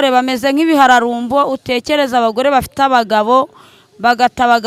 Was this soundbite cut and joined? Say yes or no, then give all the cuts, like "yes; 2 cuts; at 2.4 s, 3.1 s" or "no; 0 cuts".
no; 0 cuts